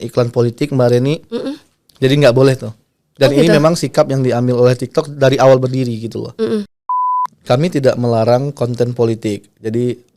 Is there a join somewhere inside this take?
yes; 1 cut; at 6.8 s

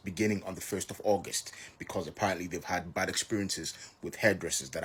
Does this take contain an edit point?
no; 0 cuts

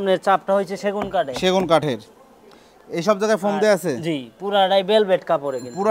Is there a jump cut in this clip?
no; 0 cuts

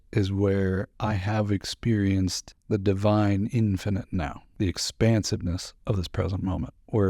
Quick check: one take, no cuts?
no; 3 cuts; at 0.9 s, 2.5 s, 4.4 s

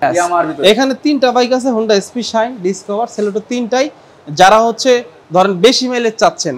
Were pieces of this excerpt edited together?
no; 0 cuts

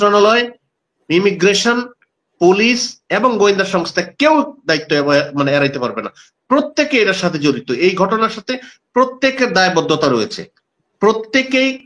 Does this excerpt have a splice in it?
no; 0 cuts

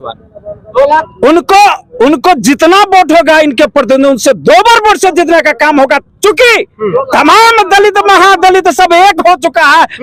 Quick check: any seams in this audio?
no; 0 cuts

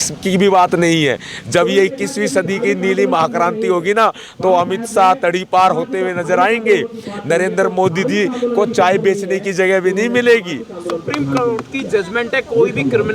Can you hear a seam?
no; 0 cuts

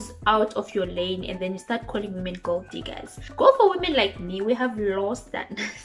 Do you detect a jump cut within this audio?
yes; 1 cut; at 3.2 s

